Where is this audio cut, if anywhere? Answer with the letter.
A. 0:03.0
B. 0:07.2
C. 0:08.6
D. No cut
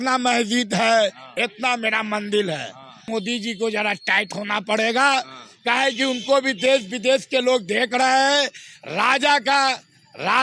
A